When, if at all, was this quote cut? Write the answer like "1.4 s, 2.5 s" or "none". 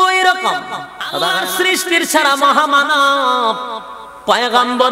1.3 s